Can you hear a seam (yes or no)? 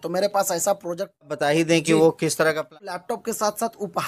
yes